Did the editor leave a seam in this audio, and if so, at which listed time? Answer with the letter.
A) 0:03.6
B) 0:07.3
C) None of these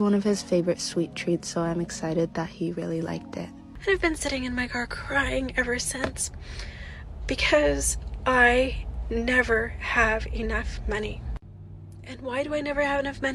A